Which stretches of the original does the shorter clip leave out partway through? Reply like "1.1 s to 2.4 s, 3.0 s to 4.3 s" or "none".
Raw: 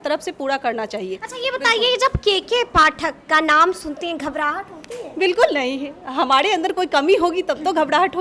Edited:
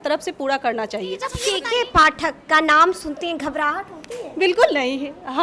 1.4 s to 2.2 s